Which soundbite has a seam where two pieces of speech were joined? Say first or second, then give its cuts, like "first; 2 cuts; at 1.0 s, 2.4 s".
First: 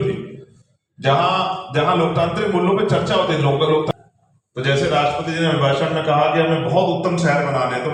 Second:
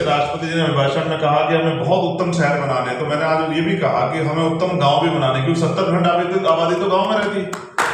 first; 1 cut; at 3.9 s